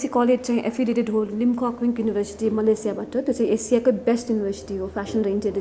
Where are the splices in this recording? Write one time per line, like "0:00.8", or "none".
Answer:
none

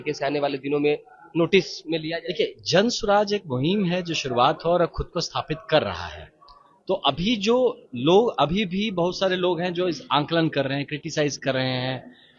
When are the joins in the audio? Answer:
none

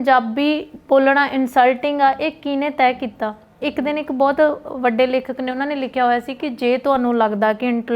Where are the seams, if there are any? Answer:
none

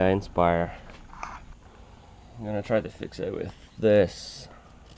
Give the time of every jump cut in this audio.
0:01.5

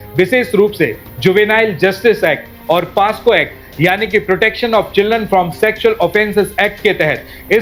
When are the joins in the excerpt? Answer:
none

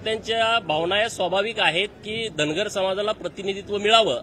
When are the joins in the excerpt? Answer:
none

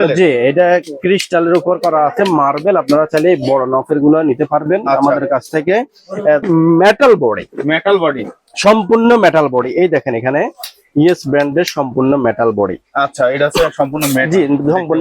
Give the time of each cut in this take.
0:06.5

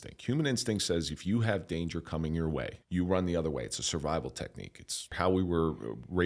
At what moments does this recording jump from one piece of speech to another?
0:02.8
0:05.1

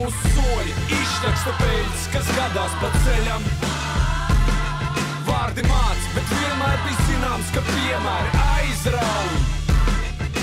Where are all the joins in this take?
none

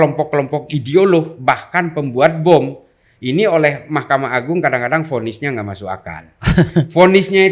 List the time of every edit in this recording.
none

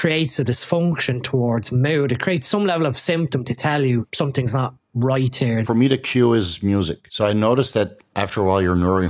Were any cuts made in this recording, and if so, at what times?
0:04.1
0:05.7
0:07.0

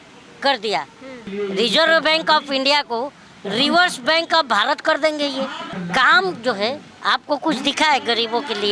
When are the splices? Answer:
0:01.2
0:05.7
0:06.9

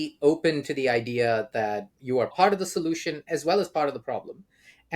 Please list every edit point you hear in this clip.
0:03.2

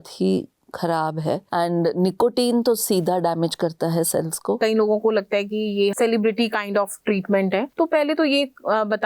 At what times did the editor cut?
0:01.4
0:04.6
0:05.9
0:07.7

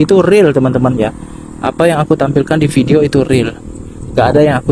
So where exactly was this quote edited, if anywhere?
none

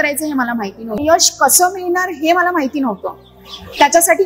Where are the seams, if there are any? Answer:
0:01.0

